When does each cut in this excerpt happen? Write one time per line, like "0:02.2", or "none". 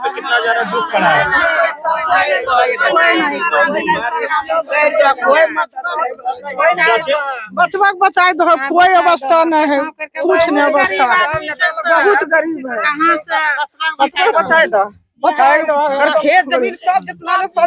none